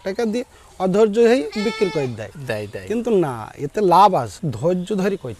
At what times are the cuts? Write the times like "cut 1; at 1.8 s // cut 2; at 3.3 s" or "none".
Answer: cut 1; at 4.4 s